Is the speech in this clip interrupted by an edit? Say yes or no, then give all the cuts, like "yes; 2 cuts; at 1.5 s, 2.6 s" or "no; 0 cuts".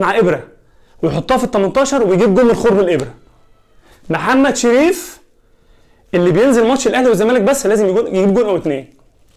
no; 0 cuts